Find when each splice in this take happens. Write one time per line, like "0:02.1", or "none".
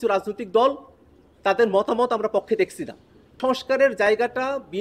0:03.3

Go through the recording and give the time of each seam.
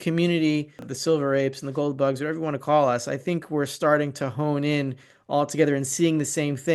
0:00.9

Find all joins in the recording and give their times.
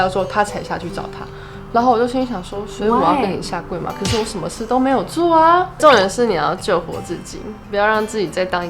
0:05.7

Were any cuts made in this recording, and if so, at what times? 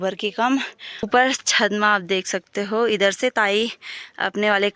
0:01.1

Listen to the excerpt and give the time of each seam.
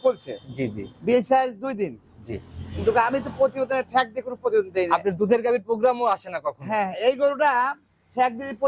none

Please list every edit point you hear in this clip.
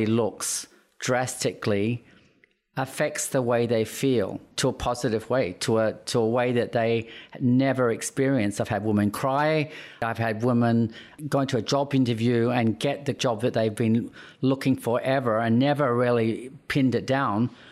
0:04.5
0:10.0
0:11.1
0:13.2

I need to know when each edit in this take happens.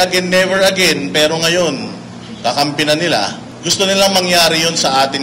0:03.5

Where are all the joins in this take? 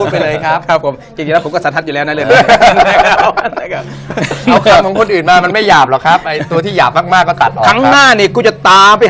0:05.1

